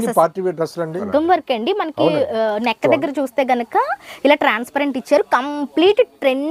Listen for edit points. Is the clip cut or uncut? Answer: cut